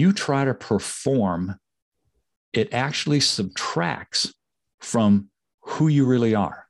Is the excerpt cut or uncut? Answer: uncut